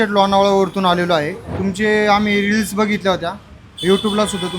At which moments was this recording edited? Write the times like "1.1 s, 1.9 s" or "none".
1.4 s